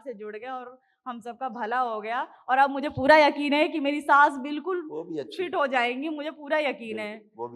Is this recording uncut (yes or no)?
yes